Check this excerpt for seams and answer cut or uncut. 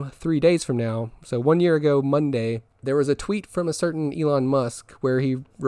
cut